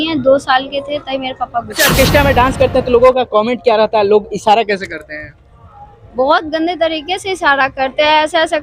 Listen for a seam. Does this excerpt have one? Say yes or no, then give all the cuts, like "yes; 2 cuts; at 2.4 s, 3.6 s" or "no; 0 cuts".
yes; 1 cut; at 1.7 s